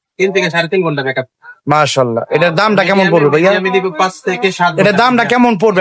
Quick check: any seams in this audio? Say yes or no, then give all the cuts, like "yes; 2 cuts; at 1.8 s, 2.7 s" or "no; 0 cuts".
no; 0 cuts